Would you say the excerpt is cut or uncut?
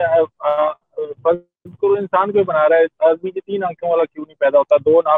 uncut